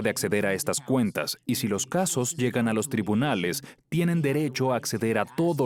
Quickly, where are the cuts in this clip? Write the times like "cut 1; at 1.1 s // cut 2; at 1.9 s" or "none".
none